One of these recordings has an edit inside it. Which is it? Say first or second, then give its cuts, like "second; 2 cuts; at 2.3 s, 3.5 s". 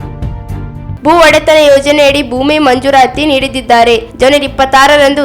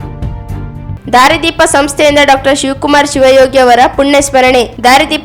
first; 1 cut; at 0.9 s